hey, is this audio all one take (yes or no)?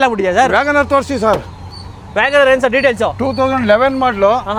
yes